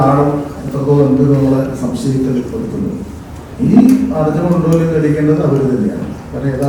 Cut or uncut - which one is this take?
uncut